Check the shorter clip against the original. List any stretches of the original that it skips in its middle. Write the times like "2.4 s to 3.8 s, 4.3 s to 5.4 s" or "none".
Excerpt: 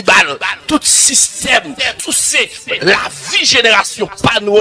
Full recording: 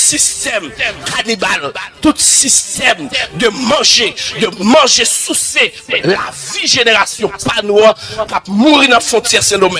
3.3 s to 5.2 s

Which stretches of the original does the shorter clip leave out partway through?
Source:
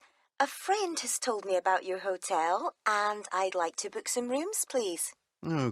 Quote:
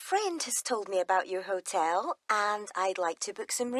none

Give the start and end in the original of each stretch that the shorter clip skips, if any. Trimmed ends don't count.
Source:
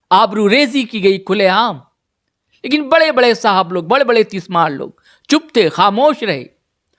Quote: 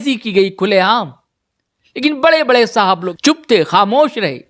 3.8 s to 5.1 s

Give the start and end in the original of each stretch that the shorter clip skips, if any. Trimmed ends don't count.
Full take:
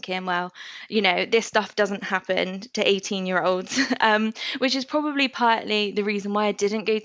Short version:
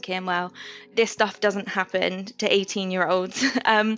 0.9 s to 1.3 s

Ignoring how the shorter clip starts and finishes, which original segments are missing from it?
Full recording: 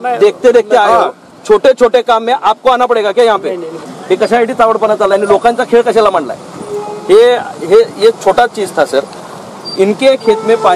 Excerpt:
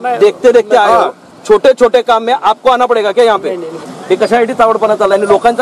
none

